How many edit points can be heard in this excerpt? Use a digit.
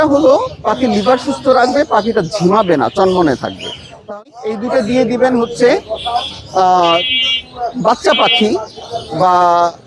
1